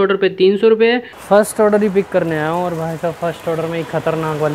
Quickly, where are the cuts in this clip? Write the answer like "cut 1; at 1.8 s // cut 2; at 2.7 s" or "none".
cut 1; at 1.1 s